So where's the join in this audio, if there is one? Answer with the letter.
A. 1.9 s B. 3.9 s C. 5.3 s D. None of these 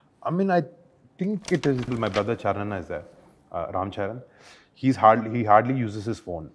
A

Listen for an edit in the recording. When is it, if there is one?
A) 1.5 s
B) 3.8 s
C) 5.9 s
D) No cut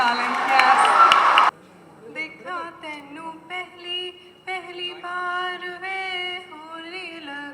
A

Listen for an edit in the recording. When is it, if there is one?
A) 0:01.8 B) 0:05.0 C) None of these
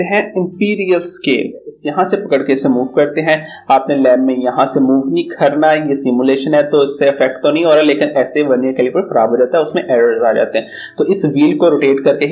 A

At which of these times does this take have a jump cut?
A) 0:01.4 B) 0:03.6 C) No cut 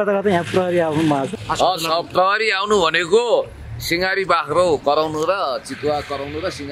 A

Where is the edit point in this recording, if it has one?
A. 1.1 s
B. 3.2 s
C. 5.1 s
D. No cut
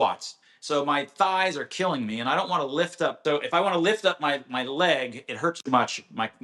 B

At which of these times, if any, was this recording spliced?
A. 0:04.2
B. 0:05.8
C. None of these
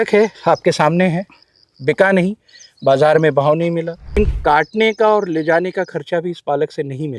A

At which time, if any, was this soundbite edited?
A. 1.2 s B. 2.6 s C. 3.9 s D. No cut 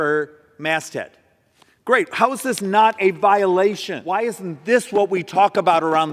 C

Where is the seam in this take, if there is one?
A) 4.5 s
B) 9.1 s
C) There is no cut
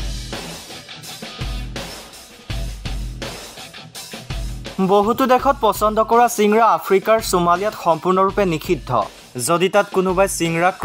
A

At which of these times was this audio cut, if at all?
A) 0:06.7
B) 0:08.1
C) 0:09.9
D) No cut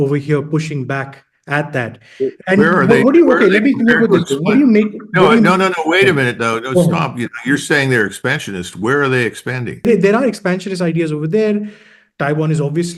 C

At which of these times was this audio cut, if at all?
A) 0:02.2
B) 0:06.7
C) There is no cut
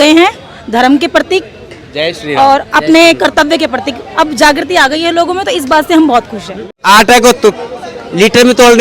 B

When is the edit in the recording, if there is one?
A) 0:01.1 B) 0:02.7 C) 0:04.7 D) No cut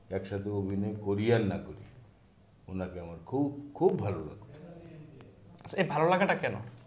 D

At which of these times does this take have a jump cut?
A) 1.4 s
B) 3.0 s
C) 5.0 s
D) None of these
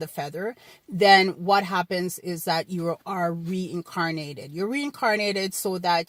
D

